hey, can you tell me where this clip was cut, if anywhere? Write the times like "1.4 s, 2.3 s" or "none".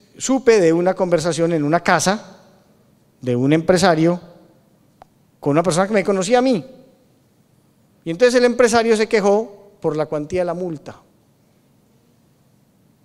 6.8 s